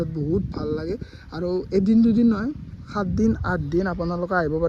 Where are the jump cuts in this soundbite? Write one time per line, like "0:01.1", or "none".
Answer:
none

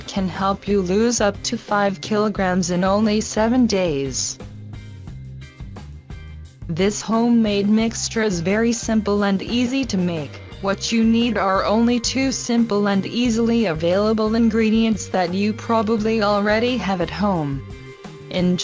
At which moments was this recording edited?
none

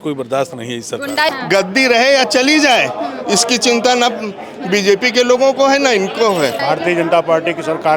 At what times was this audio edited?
0:01.3
0:06.6

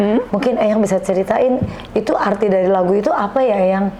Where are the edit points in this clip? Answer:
none

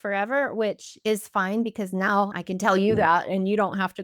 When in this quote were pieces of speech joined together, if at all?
0:02.3

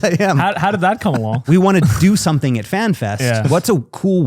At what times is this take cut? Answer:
0:01.4

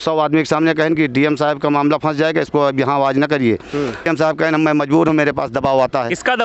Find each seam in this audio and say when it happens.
0:04.1

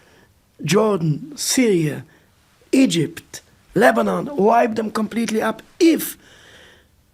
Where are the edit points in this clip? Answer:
none

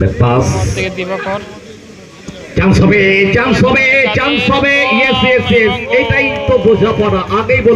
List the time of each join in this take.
none

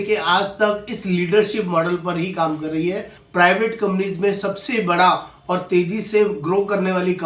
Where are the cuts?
0:03.2

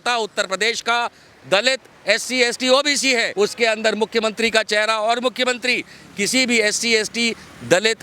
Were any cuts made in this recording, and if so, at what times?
0:03.3

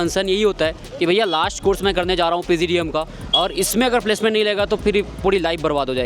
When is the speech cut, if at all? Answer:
none

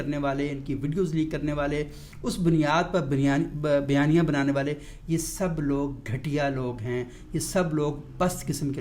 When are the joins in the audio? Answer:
none

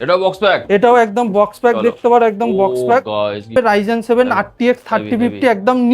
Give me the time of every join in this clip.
0:03.5

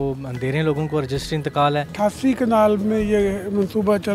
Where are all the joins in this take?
0:01.9

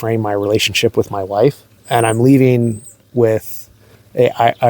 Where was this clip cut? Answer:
0:01.7

